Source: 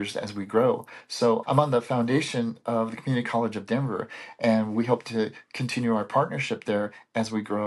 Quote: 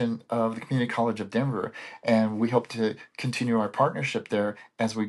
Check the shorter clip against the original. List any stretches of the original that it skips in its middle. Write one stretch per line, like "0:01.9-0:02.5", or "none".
none